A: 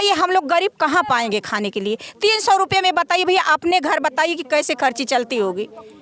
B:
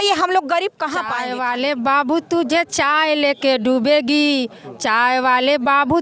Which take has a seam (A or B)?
B